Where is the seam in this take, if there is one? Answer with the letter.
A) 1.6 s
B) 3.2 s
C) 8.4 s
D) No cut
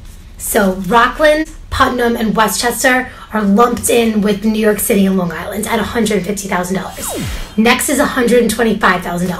A